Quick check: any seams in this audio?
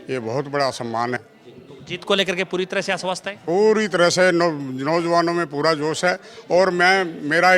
yes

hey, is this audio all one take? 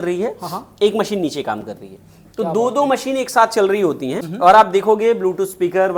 yes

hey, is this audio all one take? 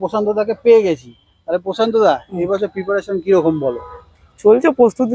yes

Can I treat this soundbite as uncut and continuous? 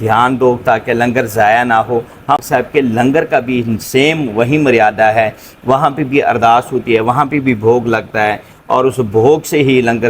no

